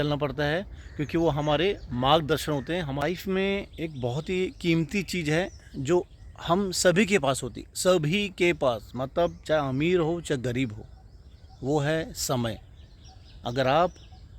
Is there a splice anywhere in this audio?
yes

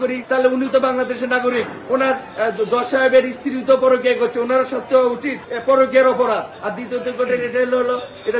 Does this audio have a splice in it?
no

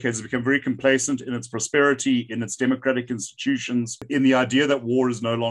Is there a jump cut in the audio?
yes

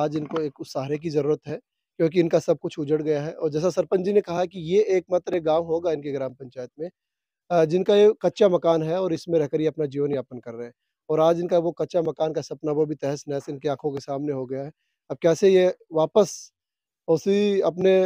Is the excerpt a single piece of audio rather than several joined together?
yes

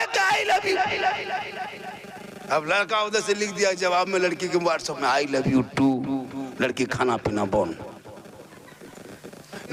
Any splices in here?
no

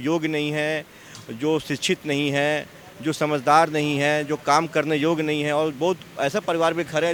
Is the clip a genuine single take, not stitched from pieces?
yes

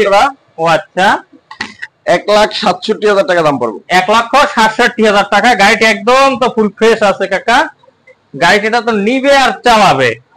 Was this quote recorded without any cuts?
yes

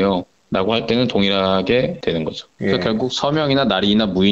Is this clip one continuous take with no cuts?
yes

